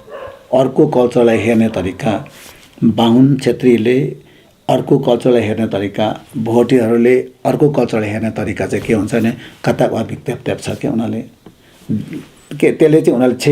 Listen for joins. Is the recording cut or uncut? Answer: uncut